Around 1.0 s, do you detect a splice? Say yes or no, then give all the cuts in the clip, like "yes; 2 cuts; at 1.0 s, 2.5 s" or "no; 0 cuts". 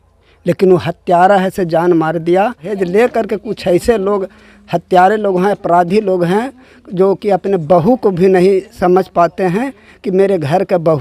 no; 1 cut; at 2.7 s